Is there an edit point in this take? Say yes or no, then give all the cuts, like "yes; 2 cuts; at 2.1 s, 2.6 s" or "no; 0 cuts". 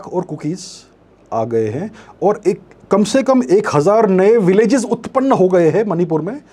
no; 0 cuts